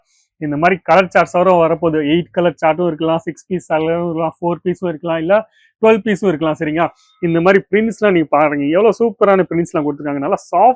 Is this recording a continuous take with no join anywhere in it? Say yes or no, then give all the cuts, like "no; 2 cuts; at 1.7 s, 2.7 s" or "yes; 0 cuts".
yes; 0 cuts